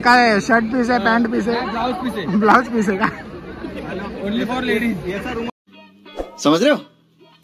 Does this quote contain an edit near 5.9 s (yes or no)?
no